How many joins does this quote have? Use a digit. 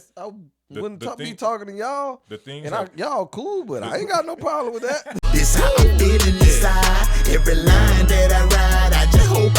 1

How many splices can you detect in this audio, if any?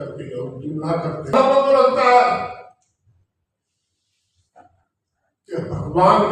1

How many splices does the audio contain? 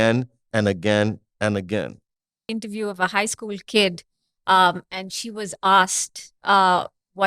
1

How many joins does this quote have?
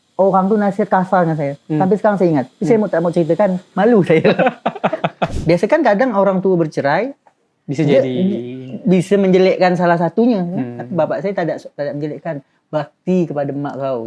1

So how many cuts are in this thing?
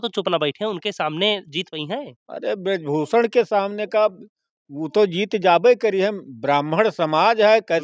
0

